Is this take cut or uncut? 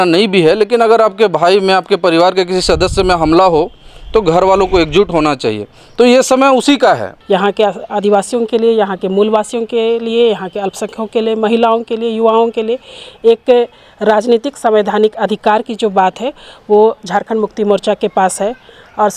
cut